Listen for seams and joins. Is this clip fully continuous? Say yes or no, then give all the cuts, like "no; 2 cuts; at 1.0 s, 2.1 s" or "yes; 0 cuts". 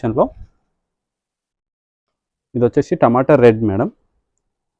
yes; 0 cuts